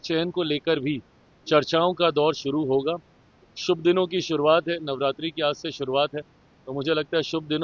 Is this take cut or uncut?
uncut